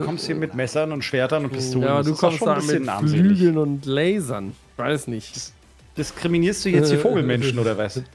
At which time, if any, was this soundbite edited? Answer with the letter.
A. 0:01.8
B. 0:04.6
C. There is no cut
C